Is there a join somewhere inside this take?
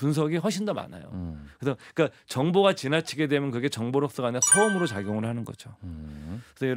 no; 0 cuts

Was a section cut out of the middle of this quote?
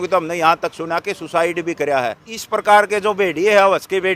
yes; 1 cut; at 2.3 s

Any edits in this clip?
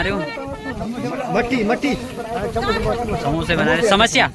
no; 0 cuts

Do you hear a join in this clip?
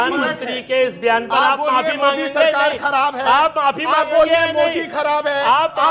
no; 0 cuts

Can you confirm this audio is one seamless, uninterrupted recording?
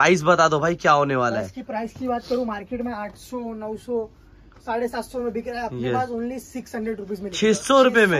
yes; 0 cuts

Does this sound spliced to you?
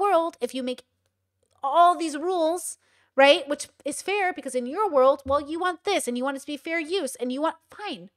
no; 0 cuts

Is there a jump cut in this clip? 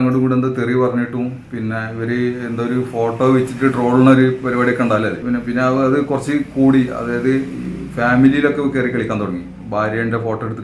yes; 1 cut; at 5.2 s

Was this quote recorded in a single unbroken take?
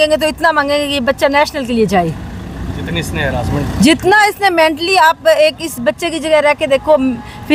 yes; 0 cuts

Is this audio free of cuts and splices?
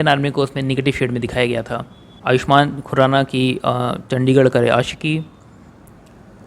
no; 1 cut; at 1.7 s

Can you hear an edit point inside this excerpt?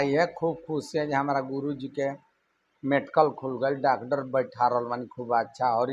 no; 0 cuts

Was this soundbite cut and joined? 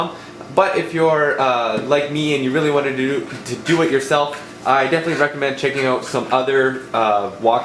yes; 1 cut; at 6.1 s

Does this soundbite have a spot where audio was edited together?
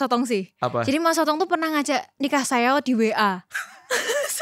no; 0 cuts

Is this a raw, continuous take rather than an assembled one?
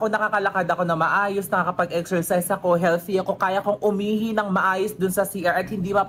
yes; 0 cuts

